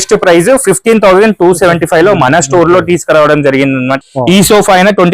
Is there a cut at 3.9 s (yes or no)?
yes